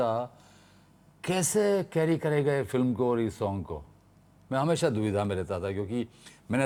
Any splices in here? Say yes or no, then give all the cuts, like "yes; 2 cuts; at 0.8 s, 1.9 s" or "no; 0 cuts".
no; 0 cuts